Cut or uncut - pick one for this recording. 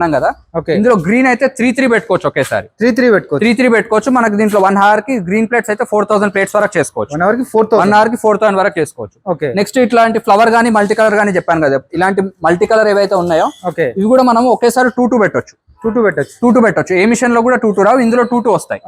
uncut